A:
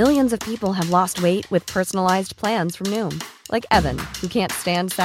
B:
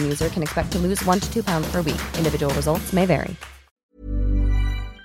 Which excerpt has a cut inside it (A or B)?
B